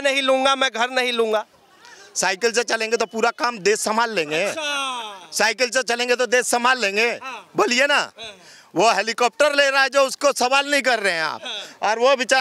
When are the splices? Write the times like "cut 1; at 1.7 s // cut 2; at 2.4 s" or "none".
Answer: none